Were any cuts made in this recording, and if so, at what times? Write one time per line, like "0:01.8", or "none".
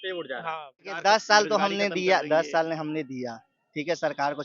0:00.9